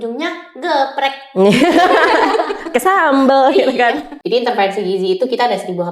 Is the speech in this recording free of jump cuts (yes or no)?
no